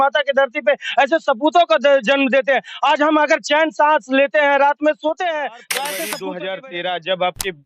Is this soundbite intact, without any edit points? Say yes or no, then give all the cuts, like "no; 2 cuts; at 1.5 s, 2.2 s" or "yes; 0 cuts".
no; 1 cut; at 6.1 s